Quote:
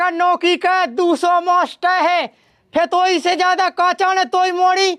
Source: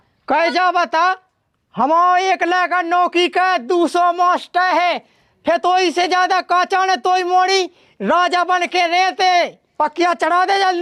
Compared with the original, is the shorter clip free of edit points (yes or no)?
yes